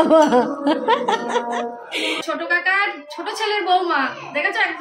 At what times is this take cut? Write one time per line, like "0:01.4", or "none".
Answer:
0:02.2